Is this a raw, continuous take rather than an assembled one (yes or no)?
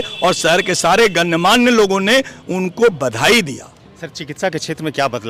yes